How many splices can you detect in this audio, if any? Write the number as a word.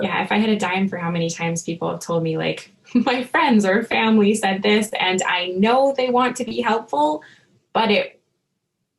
zero